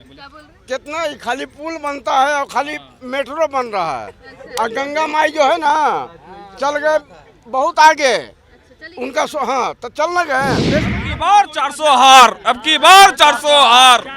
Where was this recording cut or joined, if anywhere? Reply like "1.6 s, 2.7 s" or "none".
10.9 s